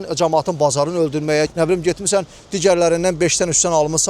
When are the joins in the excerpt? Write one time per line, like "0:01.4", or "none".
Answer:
0:01.5